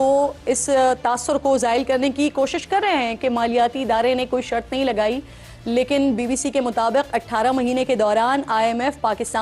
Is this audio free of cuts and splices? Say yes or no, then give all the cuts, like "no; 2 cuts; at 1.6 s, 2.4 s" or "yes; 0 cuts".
yes; 0 cuts